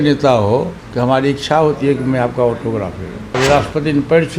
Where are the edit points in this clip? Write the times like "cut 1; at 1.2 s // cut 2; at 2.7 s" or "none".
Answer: cut 1; at 3.2 s

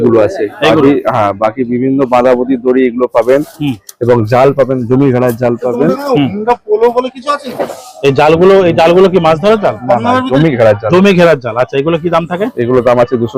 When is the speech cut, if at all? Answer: none

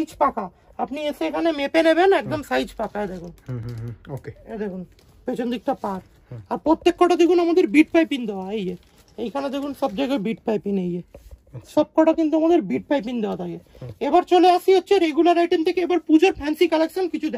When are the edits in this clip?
none

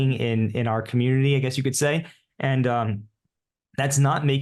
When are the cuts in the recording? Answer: none

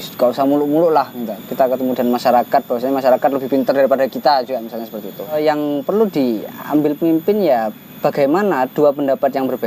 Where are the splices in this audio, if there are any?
cut 1; at 5.4 s

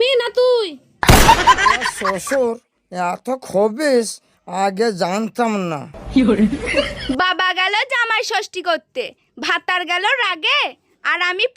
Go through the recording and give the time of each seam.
cut 1; at 1.9 s

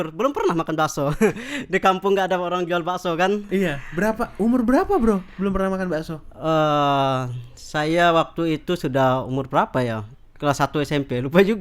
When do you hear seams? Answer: none

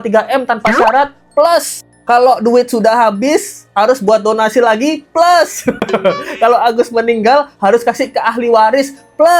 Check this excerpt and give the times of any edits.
none

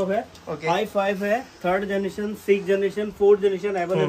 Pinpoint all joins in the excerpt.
none

